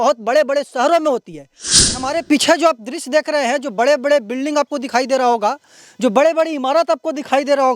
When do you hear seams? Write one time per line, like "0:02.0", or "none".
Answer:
0:01.9